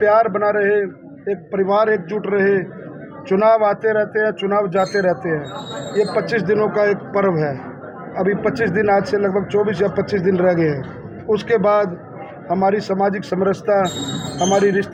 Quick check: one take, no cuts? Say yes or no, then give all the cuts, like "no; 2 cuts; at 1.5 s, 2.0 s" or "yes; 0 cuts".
yes; 0 cuts